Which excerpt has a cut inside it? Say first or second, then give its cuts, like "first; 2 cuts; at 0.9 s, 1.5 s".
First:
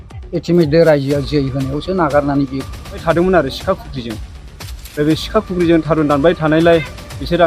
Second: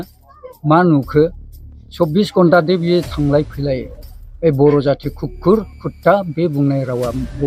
first; 1 cut; at 3.0 s